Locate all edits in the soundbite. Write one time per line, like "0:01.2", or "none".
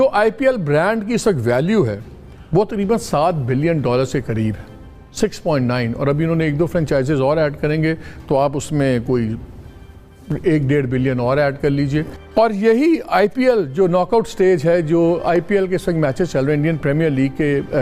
0:12.2